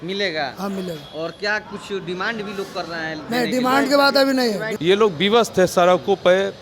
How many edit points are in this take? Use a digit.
1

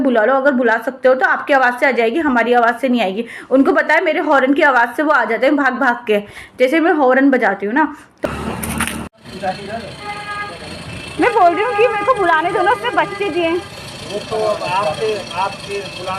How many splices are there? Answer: 0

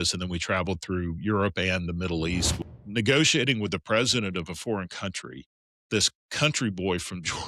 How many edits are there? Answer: 1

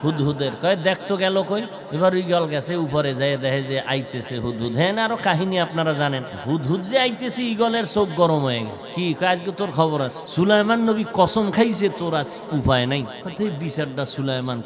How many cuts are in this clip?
5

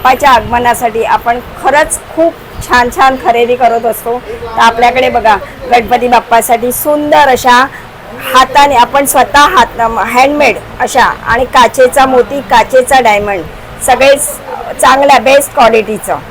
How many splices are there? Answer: 0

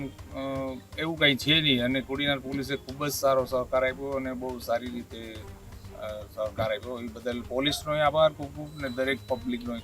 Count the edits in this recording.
0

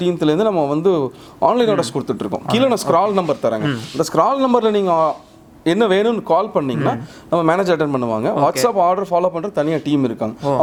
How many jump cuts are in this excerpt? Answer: 0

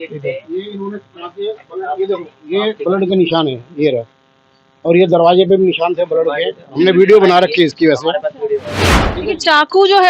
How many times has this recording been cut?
1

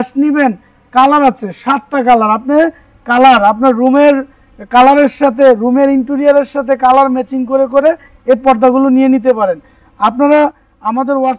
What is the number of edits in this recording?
0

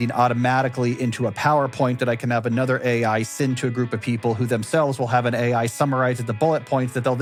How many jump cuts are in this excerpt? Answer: 0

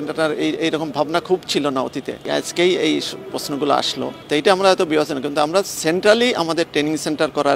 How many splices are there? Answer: 0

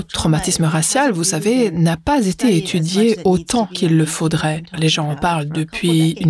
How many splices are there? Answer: 2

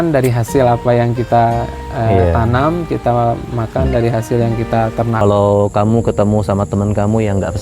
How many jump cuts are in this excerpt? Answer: 1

